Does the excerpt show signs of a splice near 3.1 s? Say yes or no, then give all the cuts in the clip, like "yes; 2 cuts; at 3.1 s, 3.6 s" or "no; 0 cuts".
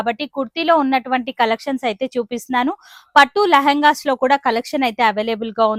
no; 0 cuts